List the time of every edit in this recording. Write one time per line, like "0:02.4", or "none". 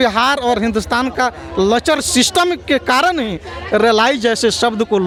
none